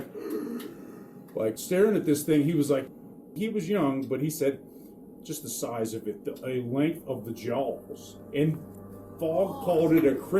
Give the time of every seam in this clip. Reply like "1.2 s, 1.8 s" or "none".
2.9 s, 8.1 s, 8.7 s